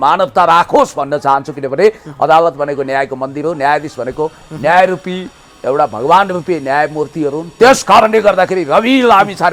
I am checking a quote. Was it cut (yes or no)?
no